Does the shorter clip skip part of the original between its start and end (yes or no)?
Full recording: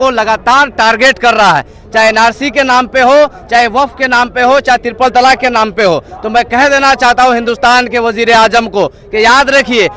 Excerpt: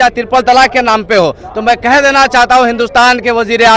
no